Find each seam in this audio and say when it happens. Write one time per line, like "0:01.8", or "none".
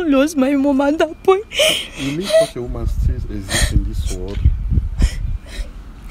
none